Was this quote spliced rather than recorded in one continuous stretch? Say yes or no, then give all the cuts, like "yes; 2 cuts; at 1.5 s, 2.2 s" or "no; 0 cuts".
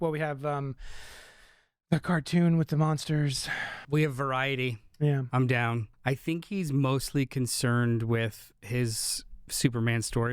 yes; 2 cuts; at 3.8 s, 5.9 s